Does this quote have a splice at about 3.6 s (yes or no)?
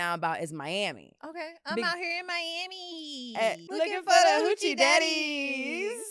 yes